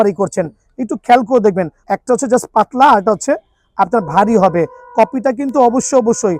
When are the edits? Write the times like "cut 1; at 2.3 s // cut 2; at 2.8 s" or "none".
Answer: cut 1; at 1.8 s